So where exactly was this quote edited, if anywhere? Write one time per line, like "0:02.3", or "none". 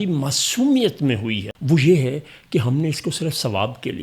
0:01.5